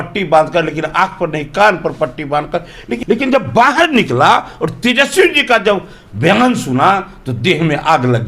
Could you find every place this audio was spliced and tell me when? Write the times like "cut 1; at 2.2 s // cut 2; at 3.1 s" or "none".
cut 1; at 2.9 s